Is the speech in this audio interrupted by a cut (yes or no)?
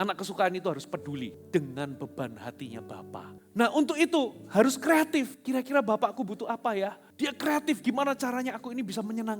yes